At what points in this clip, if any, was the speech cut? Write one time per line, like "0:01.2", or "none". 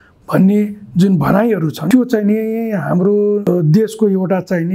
0:01.8
0:03.4